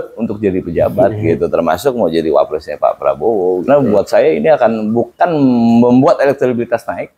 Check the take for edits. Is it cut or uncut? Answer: cut